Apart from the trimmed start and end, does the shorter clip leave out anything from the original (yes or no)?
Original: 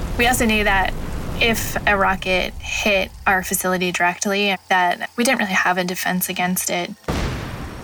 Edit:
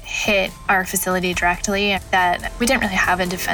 no